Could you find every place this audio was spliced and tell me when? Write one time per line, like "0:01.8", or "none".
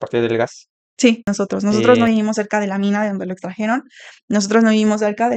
0:01.3